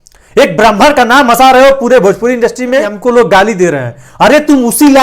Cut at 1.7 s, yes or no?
no